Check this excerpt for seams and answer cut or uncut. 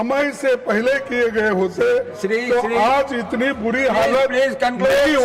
uncut